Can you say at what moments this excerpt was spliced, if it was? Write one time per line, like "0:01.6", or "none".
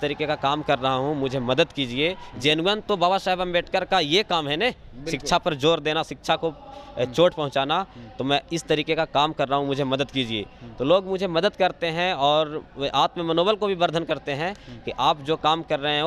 none